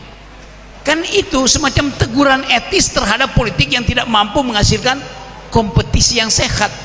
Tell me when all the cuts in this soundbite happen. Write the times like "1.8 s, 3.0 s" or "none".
none